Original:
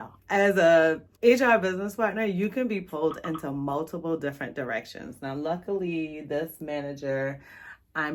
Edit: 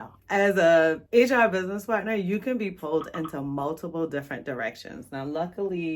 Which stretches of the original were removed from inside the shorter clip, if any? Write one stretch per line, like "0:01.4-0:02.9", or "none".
0:01.0-0:01.1

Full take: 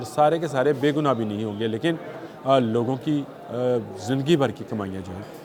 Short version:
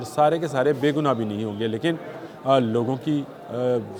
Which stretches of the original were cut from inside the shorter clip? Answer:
none

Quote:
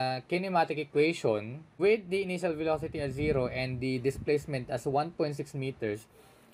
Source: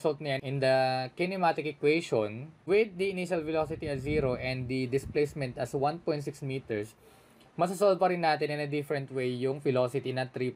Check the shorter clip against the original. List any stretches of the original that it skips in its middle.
none

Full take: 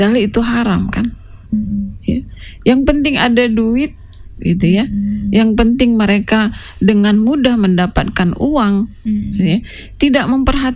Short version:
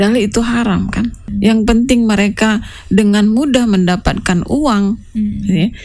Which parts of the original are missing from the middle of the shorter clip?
0:01.3-0:05.2

